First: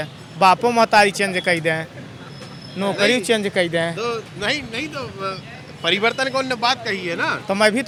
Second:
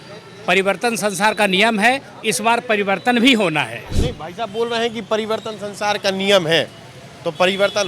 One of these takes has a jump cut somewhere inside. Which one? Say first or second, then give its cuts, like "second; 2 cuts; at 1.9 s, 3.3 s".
second; 1 cut; at 3.9 s